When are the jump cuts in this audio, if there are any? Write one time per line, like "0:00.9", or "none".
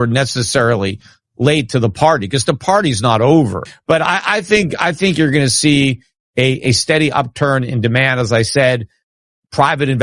0:03.7